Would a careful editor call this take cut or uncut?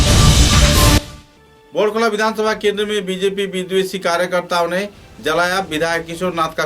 cut